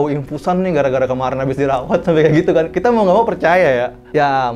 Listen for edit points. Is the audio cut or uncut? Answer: uncut